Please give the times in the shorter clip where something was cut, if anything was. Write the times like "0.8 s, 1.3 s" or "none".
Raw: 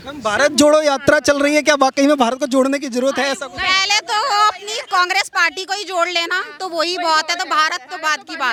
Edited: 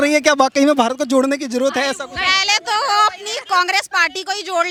none